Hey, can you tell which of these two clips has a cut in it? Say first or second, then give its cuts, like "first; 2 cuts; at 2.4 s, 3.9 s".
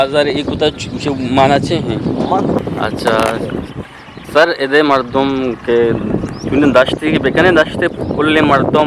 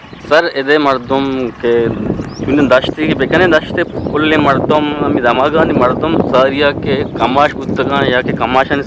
first; 1 cut; at 2.6 s